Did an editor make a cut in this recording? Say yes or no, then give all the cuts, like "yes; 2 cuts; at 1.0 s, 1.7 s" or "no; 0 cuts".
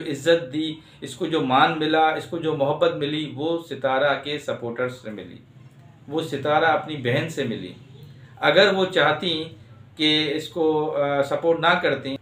no; 0 cuts